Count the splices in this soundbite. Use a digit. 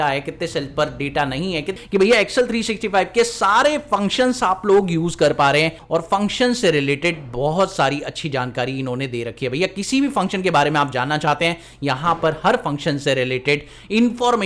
2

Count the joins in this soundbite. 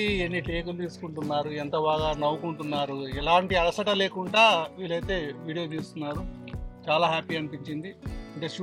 0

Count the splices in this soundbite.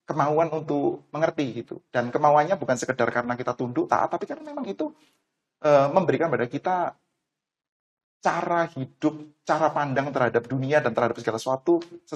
0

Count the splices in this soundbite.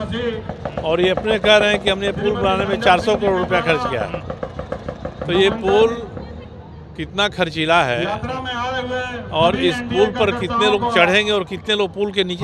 0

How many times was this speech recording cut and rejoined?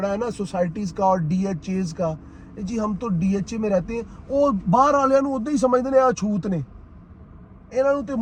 0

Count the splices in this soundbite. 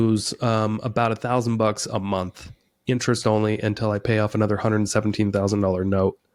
0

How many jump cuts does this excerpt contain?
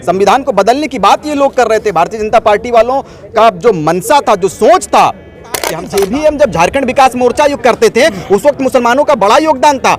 1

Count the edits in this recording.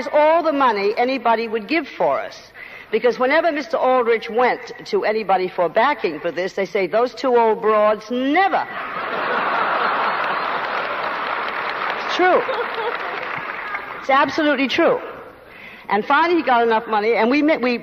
1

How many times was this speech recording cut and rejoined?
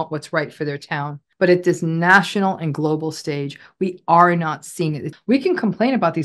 2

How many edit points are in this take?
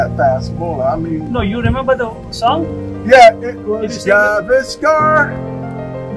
1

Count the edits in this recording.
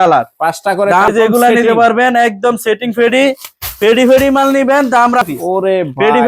2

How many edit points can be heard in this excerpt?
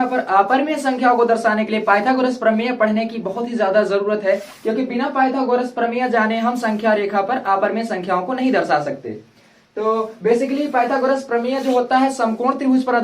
0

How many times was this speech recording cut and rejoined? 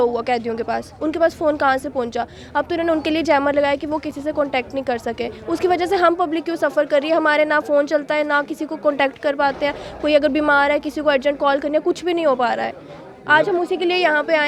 0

